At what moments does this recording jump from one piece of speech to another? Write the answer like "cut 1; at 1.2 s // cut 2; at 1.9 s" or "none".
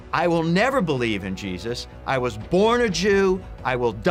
none